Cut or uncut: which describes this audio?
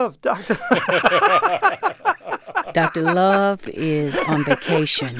uncut